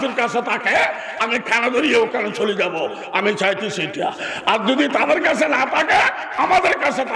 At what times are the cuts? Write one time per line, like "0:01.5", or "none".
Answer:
none